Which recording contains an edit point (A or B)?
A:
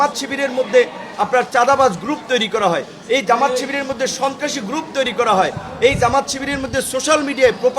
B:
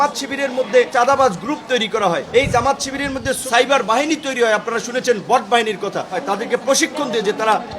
B